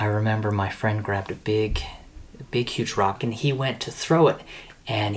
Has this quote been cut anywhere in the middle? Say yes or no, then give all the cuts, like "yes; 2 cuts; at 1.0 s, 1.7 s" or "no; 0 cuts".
yes; 1 cut; at 3.2 s